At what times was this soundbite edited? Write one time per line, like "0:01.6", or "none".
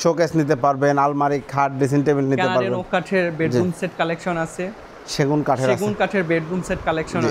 none